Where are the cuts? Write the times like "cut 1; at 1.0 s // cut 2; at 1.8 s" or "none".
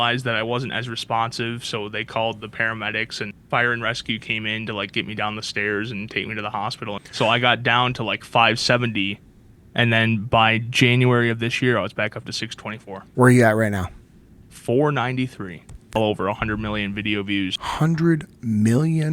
cut 1; at 3.3 s // cut 2; at 7.0 s // cut 3; at 13.0 s // cut 4; at 16.0 s // cut 5; at 17.6 s